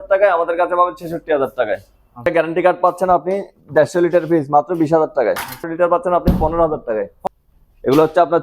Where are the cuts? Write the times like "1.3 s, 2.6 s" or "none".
2.3 s, 5.7 s, 7.1 s